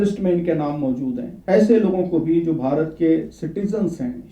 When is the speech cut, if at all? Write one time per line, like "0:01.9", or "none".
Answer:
0:01.3